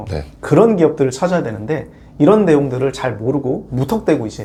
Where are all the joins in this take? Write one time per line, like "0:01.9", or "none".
none